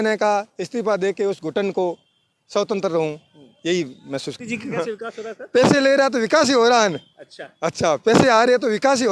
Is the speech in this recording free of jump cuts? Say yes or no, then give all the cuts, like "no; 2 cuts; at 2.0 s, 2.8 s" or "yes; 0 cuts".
no; 1 cut; at 4.4 s